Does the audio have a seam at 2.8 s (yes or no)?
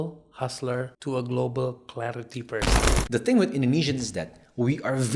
yes